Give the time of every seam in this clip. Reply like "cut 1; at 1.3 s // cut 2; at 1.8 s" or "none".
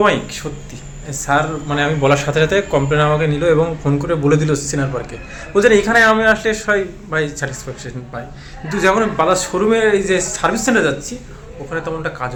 none

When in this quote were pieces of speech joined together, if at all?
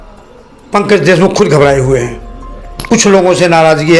cut 1; at 2.8 s

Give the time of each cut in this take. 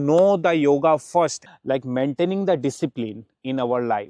cut 1; at 1.4 s

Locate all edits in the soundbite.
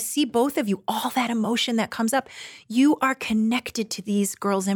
none

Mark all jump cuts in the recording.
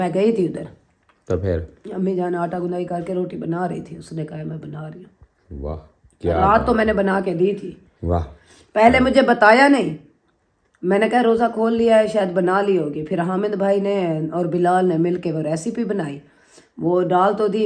none

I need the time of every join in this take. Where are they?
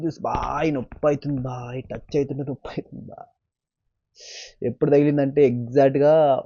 none

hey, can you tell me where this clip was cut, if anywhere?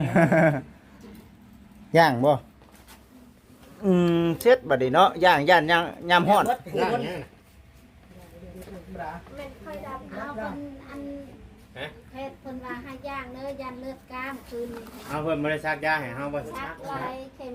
none

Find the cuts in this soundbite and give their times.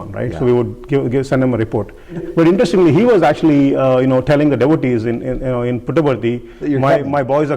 cut 1; at 2.2 s

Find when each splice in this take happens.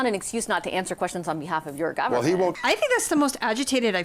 cut 1; at 2.6 s

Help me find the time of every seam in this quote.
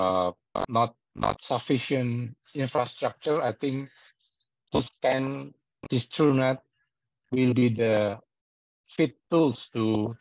cut 1; at 9.2 s

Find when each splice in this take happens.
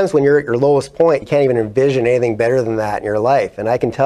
cut 1; at 1.2 s

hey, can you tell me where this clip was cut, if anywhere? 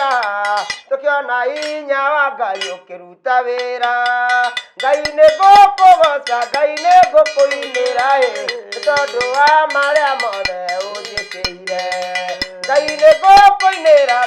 none

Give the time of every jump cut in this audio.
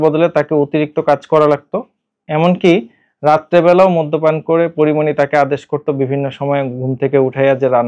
none

